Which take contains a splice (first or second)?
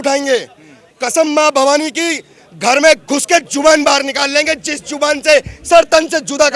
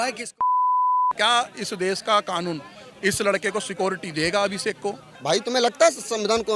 second